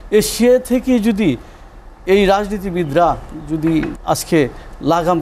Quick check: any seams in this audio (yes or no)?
yes